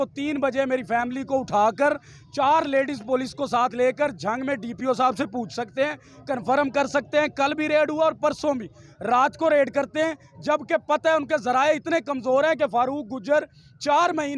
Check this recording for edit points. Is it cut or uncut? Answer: uncut